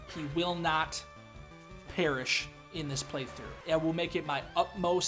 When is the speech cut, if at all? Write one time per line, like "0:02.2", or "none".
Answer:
0:03.5